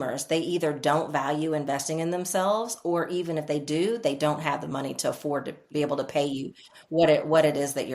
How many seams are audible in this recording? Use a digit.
1